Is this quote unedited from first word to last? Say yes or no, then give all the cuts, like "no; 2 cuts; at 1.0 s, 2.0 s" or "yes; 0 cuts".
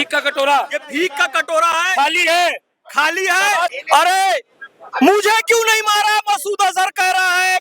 no; 1 cut; at 3.7 s